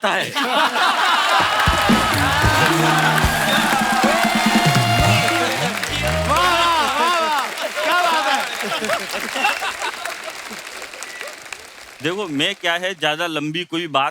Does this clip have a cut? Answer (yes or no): no